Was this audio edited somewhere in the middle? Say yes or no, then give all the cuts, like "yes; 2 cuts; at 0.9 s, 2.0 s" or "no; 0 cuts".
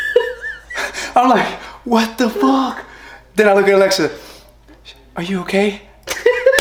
no; 0 cuts